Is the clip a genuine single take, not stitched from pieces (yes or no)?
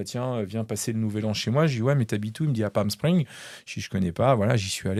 yes